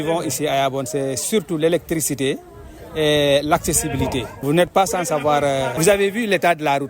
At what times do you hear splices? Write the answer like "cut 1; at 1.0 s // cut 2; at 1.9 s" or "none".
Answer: cut 1; at 4.4 s // cut 2; at 5.8 s